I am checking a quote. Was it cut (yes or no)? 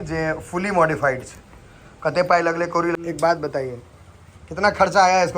yes